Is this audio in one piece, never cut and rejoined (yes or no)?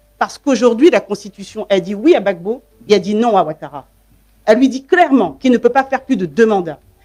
yes